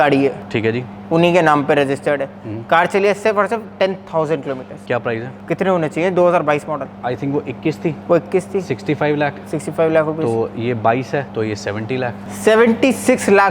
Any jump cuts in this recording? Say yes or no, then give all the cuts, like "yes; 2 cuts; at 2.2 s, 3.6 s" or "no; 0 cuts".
no; 0 cuts